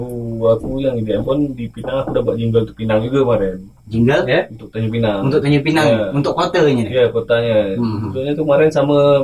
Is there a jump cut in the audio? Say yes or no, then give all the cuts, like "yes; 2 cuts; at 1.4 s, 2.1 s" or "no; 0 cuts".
no; 0 cuts